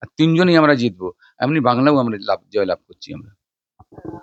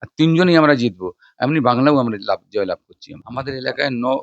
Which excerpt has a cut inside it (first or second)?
second